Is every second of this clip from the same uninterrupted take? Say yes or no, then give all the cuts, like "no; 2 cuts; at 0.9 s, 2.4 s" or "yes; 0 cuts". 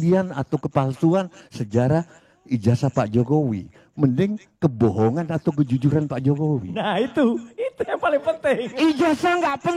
yes; 0 cuts